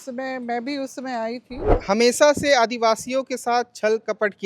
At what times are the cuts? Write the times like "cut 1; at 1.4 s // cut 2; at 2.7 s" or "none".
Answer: cut 1; at 1.7 s